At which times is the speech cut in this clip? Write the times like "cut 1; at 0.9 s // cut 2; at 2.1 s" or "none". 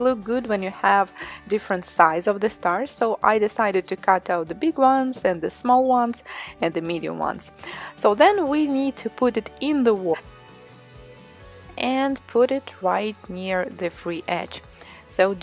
none